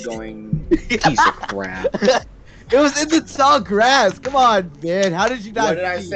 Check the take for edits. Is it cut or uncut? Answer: cut